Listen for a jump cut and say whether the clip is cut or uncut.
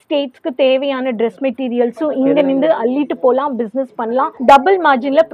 uncut